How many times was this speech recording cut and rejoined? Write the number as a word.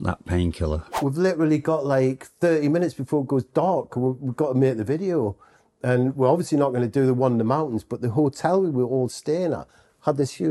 one